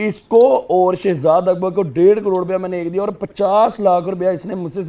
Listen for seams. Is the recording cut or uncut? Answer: uncut